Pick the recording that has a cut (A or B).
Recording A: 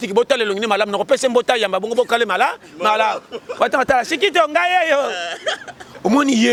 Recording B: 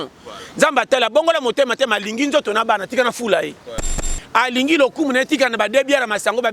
B